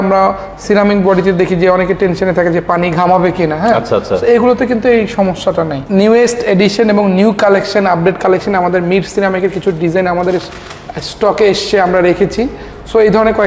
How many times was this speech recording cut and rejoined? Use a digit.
1